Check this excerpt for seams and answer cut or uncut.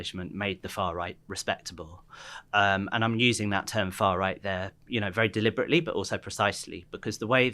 uncut